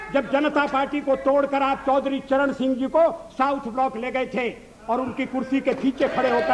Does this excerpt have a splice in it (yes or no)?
no